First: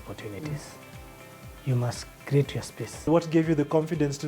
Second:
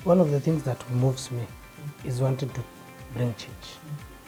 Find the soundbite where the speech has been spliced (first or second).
first